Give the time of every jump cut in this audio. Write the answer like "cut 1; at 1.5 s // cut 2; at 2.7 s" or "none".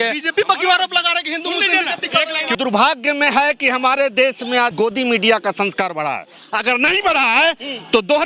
cut 1; at 2.6 s // cut 2; at 4.7 s